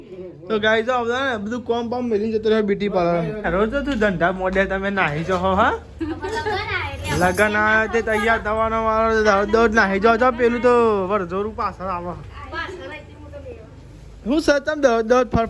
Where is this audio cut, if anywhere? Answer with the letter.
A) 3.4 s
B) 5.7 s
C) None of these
A